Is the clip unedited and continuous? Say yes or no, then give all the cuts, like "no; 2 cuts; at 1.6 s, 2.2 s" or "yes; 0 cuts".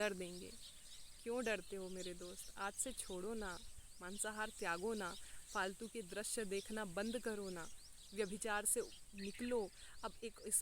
yes; 0 cuts